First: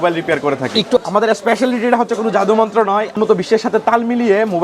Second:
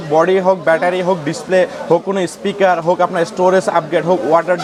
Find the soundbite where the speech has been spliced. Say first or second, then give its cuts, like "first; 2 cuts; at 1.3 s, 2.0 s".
first; 2 cuts; at 1.0 s, 3.1 s